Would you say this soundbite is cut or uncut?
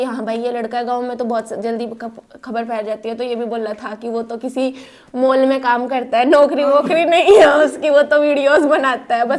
uncut